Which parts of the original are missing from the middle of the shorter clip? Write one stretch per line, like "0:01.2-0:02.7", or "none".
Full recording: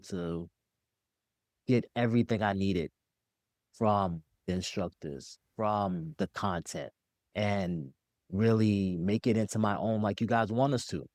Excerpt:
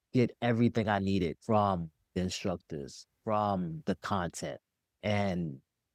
0:02.9-0:03.7